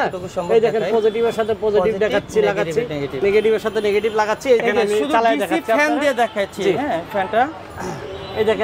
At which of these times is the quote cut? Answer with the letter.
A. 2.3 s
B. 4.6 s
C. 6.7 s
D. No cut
B